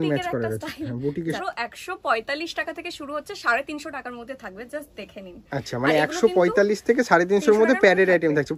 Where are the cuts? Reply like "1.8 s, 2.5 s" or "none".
1.4 s